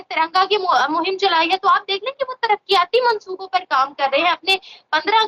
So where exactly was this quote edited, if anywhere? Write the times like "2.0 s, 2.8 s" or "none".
none